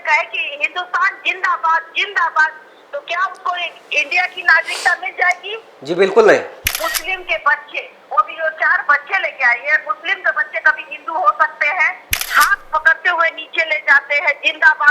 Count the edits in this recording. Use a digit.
2